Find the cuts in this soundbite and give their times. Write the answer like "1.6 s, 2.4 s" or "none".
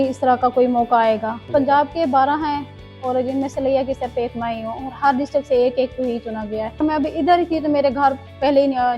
1.4 s, 6.8 s